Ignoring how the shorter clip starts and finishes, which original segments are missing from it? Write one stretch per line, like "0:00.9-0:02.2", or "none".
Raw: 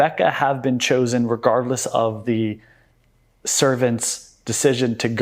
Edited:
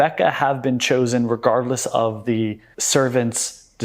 0:02.7-0:03.4